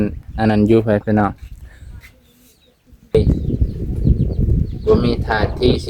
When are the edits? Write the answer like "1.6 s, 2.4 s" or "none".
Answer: 3.1 s